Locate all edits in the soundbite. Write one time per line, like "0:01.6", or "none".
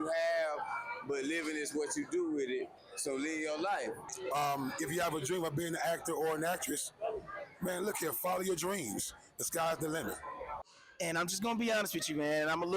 0:04.1
0:10.8